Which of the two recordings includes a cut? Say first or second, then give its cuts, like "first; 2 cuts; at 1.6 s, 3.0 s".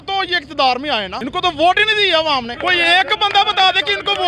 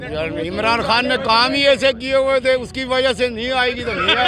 first; 2 cuts; at 1.2 s, 2.5 s